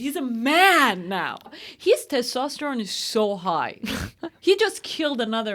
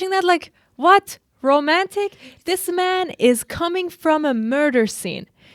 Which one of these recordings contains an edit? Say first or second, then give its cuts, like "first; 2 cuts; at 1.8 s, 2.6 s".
first; 1 cut; at 1.4 s